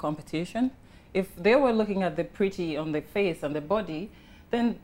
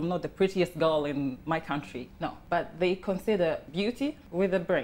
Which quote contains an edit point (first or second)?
second